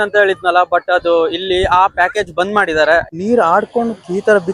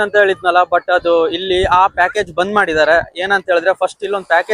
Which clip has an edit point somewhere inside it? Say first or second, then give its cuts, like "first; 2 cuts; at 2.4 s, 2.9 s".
first; 1 cut; at 3.1 s